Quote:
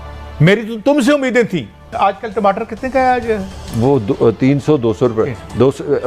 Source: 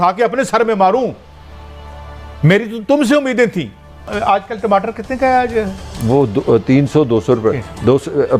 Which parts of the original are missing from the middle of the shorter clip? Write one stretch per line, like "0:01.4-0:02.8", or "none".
0:03.8-0:04.1